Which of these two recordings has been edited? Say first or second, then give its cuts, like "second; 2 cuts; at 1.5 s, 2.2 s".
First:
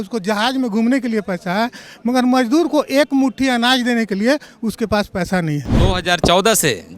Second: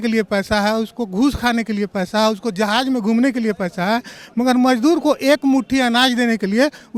first; 1 cut; at 5.7 s